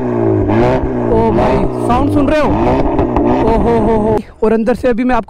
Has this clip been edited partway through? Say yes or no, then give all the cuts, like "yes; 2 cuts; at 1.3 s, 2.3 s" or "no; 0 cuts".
yes; 1 cut; at 4.2 s